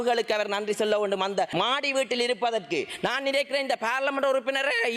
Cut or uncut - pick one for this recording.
cut